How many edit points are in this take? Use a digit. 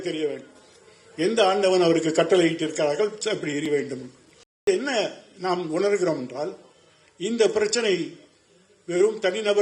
1